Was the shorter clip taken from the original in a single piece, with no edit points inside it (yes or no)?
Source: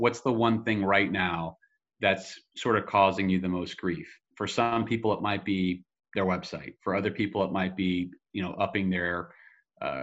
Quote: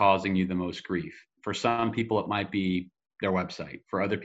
yes